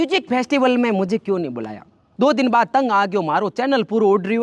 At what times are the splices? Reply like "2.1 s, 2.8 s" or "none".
2.0 s